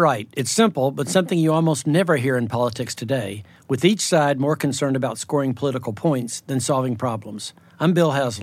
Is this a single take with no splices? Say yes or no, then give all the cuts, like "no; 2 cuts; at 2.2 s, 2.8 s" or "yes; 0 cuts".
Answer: yes; 0 cuts